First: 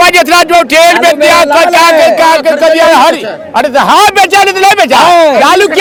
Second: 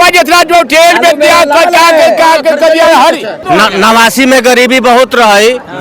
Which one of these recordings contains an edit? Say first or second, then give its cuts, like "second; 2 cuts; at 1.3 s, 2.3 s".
second; 1 cut; at 3.3 s